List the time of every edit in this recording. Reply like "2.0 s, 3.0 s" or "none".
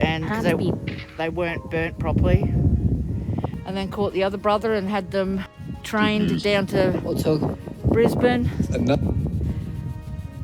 3.6 s